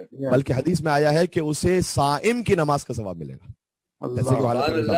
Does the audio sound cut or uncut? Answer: uncut